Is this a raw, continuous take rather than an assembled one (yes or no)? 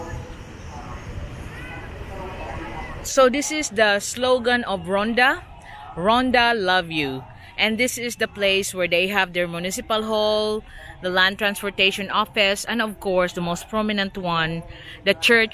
yes